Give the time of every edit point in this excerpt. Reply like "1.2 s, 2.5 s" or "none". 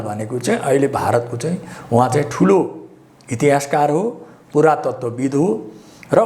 none